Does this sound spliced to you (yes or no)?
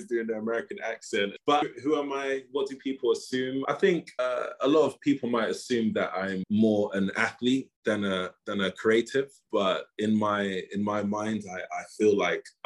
yes